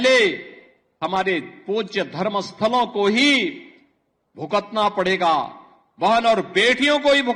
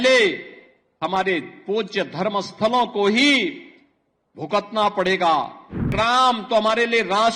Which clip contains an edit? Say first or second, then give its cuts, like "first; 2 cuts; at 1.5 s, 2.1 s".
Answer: second; 1 cut; at 5.9 s